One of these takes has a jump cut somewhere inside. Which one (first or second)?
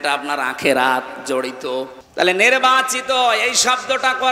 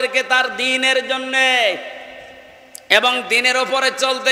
first